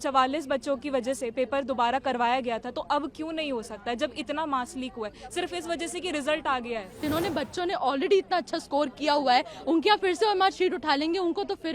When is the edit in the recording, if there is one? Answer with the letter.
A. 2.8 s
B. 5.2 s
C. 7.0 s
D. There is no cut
C